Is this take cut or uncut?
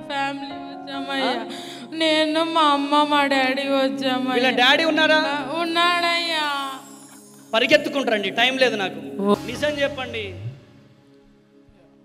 cut